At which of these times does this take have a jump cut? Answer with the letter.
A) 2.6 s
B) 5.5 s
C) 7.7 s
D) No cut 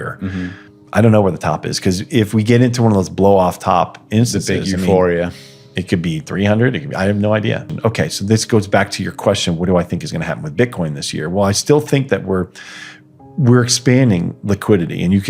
C